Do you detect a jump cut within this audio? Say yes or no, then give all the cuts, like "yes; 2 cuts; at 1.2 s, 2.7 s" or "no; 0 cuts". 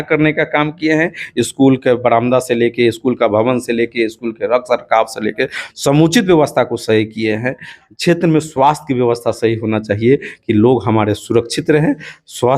yes; 1 cut; at 7.8 s